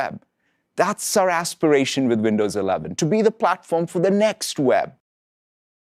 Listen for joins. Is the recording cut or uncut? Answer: uncut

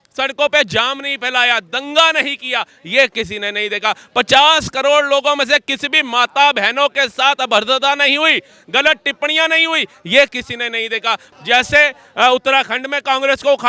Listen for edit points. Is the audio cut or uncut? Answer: cut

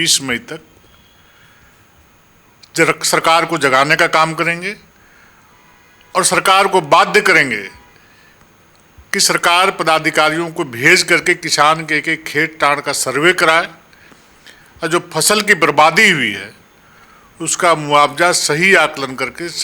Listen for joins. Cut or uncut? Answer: uncut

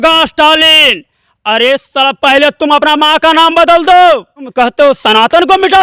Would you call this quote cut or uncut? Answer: cut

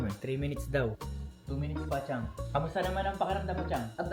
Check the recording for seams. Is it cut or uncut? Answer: uncut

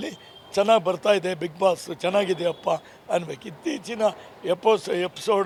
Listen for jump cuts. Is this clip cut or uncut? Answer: uncut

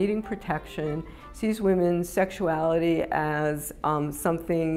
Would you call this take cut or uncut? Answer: uncut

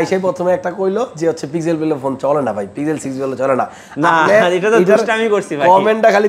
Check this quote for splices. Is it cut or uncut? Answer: uncut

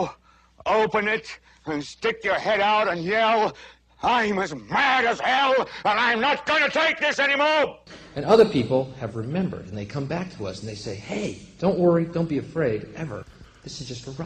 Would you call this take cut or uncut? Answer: uncut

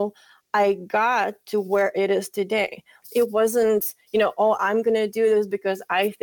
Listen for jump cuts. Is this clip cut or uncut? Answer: cut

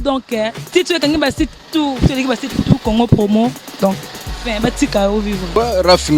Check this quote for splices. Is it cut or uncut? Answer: uncut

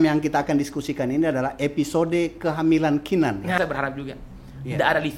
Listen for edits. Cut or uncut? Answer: cut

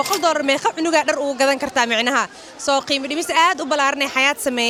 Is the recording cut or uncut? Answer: uncut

